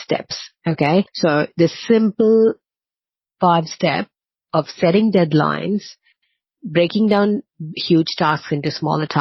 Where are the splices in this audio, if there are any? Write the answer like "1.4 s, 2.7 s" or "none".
1.1 s